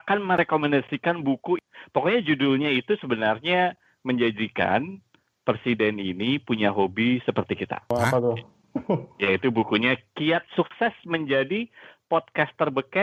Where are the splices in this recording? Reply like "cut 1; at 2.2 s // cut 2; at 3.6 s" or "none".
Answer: none